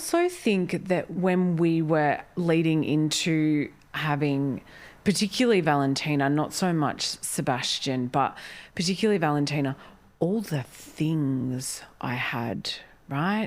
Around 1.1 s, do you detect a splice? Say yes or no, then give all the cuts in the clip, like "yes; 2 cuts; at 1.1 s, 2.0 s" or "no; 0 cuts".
yes; 1 cut; at 1.1 s